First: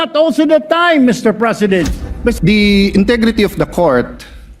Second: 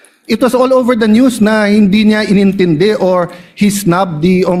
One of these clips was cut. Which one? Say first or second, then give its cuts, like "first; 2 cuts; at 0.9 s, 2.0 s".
first; 1 cut; at 2.3 s